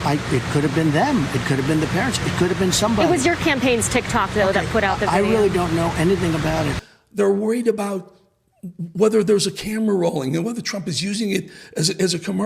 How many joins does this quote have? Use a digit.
1